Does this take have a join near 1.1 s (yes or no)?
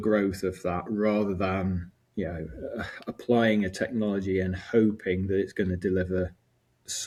no